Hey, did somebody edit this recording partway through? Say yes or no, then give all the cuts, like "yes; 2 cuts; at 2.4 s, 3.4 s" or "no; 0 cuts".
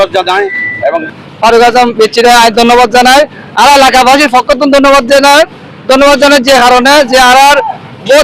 yes; 1 cut; at 1.1 s